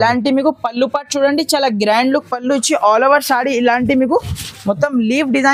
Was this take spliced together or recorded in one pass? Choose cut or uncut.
uncut